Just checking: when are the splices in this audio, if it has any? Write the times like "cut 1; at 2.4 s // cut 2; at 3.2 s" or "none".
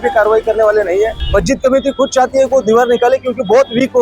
cut 1; at 1.1 s